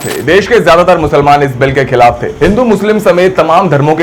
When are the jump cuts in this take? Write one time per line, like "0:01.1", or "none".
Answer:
0:02.3